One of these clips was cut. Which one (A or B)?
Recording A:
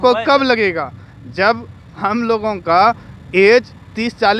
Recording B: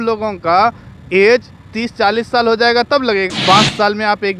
B